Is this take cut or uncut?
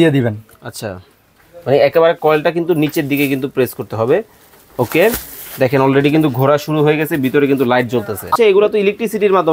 cut